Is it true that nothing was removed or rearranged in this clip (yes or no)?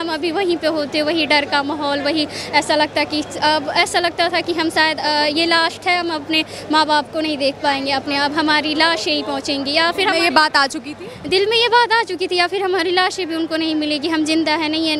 yes